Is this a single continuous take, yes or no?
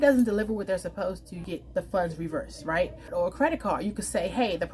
no